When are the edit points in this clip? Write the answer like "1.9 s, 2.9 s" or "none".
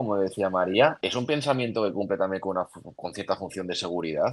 1.0 s

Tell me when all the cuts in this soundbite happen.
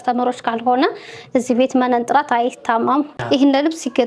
3.1 s

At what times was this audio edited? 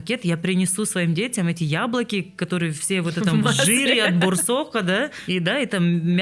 5.2 s

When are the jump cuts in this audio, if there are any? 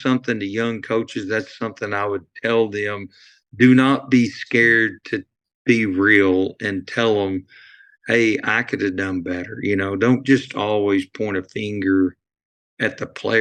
none

